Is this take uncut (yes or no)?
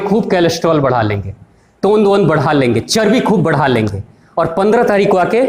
yes